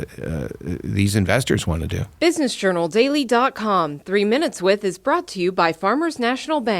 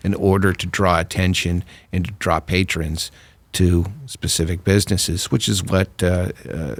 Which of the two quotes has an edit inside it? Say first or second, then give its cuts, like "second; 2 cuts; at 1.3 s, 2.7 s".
first; 1 cut; at 2.0 s